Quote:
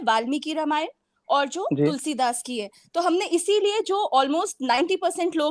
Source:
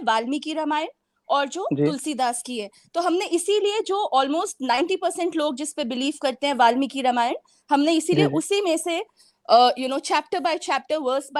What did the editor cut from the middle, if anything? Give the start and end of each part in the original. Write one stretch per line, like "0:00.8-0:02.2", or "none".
none

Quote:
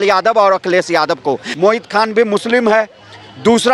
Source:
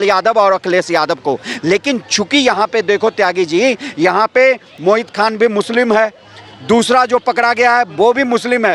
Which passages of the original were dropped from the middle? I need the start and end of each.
0:01.5-0:04.7

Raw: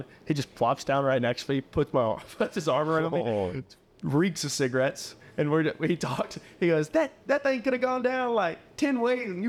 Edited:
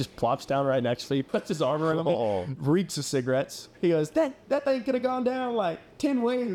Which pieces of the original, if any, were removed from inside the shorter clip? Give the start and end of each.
0:01.7-0:02.3
0:03.6-0:04.0
0:05.1-0:06.4

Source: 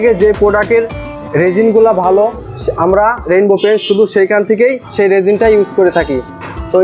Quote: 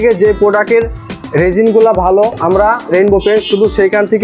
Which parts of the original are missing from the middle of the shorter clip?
0:02.4-0:02.8

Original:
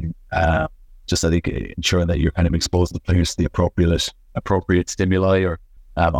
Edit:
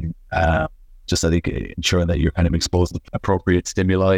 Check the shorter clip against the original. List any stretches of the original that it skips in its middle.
0:03.0-0:04.2

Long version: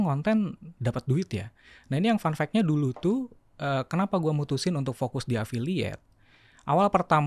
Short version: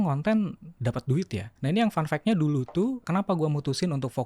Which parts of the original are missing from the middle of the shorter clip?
0:01.4-0:01.7
0:03.3-0:03.9

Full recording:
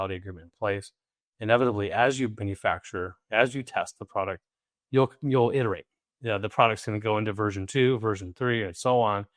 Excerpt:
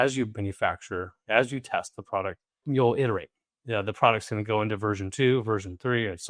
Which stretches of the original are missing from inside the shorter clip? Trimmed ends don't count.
0:04.6-0:05.2

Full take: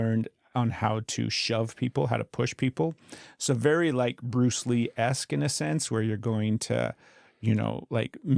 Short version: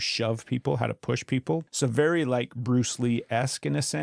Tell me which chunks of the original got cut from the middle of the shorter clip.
0:03.0-0:03.4

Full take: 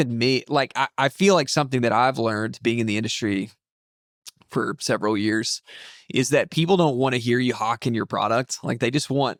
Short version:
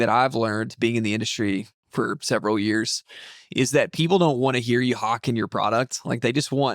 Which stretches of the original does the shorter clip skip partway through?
0:03.6-0:04.4

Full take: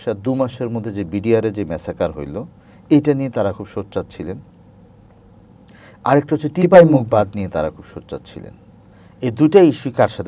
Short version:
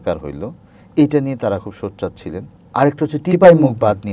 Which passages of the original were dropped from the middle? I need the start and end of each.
0:04.5-0:05.9

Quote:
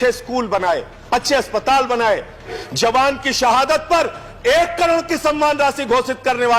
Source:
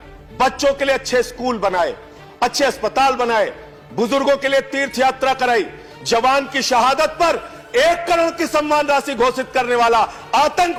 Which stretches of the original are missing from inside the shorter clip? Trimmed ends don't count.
0:02.0-0:02.2
0:03.8-0:05.8

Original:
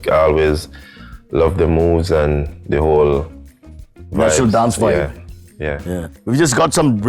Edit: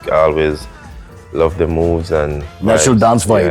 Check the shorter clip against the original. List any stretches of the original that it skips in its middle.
0:02.4-0:04.0

